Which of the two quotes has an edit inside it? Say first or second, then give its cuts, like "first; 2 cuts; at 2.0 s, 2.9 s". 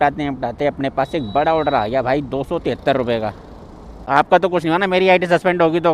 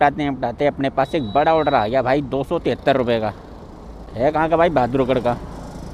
first; 1 cut; at 4.1 s